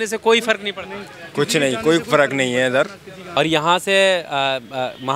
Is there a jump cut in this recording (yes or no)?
yes